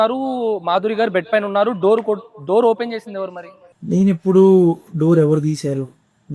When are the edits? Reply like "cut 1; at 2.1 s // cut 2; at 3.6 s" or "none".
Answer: none